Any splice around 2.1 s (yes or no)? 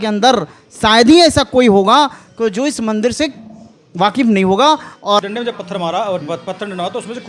no